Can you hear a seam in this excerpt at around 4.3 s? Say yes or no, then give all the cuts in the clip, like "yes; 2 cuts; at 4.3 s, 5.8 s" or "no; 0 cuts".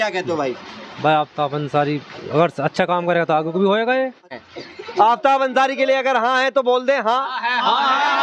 yes; 1 cut; at 4.3 s